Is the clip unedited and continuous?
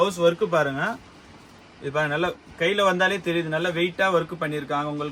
yes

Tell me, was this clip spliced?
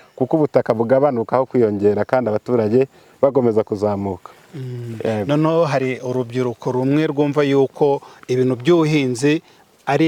no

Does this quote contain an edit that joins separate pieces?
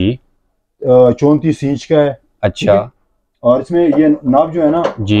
no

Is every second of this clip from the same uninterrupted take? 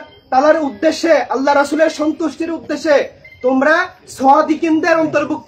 yes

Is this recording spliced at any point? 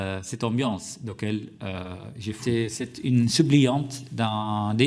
yes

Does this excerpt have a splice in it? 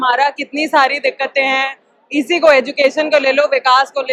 no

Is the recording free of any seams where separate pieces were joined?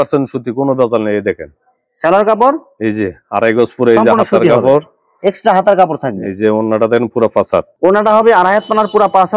yes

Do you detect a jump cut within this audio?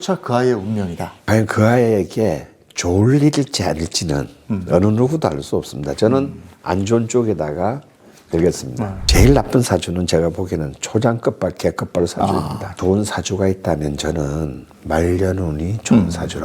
yes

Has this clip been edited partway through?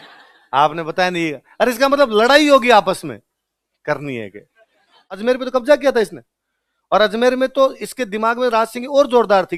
yes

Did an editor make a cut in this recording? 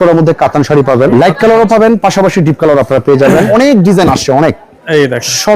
yes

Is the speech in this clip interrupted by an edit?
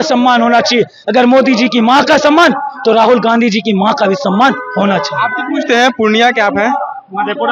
no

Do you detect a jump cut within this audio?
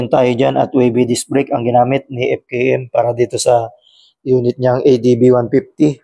no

